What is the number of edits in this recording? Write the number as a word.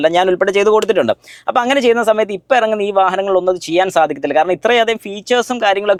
zero